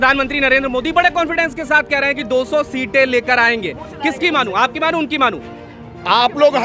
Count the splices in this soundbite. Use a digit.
0